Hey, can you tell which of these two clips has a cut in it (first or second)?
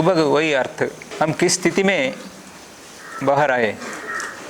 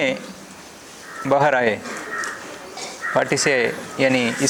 first